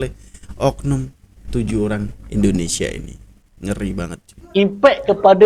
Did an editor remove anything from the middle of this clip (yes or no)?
yes